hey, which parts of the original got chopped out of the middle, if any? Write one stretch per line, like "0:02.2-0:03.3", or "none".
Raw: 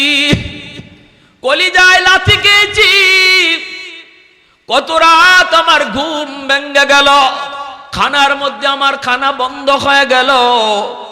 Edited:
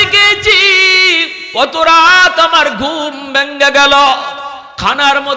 0:03.7-0:04.5